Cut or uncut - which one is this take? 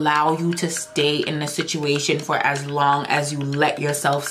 uncut